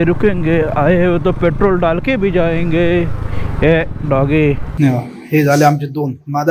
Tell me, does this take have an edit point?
yes; 1 cut; at 4.7 s

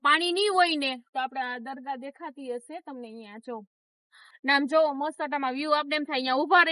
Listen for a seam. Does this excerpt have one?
yes; 1 cut; at 4.3 s

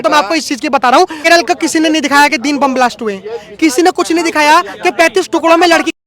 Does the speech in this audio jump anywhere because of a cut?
yes; 1 cut; at 1.2 s

